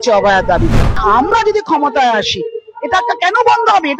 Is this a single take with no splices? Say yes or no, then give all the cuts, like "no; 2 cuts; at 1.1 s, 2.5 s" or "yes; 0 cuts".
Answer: no; 1 cut; at 1.0 s